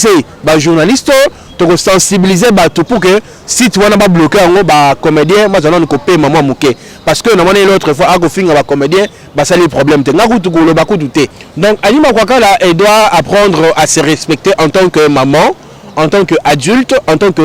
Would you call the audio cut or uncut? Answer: uncut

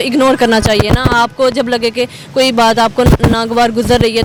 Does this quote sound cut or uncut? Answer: uncut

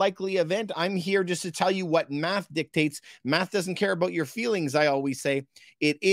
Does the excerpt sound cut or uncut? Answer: uncut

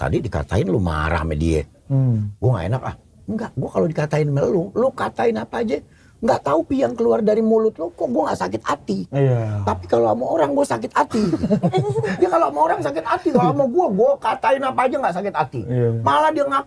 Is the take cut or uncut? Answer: uncut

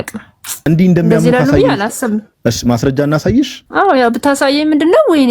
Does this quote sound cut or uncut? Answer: cut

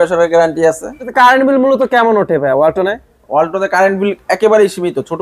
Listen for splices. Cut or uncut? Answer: cut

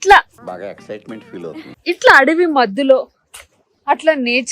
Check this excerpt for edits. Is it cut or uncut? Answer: uncut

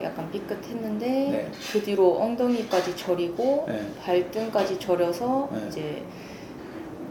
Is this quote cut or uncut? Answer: uncut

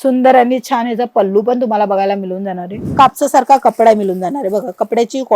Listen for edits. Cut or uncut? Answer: cut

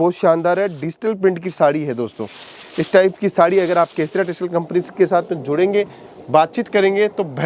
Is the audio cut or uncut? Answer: uncut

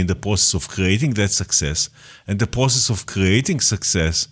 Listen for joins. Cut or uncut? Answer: uncut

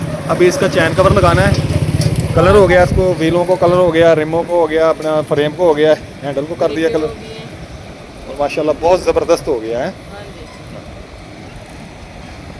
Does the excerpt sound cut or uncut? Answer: uncut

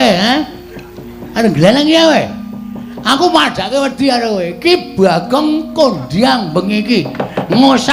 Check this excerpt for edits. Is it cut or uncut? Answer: uncut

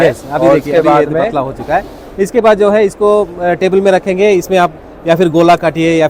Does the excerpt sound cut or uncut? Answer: uncut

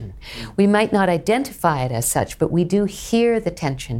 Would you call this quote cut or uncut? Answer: uncut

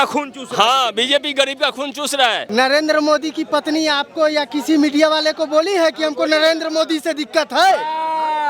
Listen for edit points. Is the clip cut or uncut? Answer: cut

